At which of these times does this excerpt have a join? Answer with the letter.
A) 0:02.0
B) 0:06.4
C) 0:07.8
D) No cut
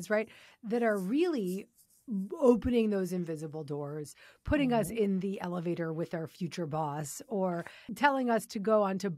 C